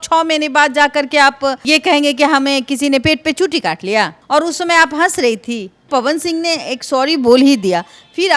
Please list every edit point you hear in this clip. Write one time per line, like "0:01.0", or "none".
0:04.2
0:05.9